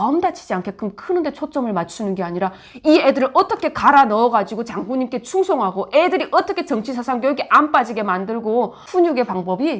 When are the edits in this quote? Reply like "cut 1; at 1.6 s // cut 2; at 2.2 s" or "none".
none